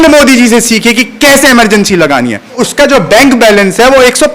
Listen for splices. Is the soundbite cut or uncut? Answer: cut